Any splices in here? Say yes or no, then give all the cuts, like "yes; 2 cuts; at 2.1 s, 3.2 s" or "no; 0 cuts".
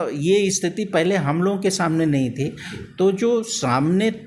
no; 0 cuts